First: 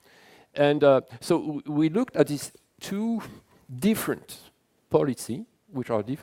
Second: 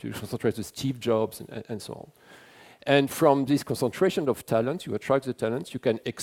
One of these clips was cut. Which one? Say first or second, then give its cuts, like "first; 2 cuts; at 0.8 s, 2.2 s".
first; 1 cut; at 0.9 s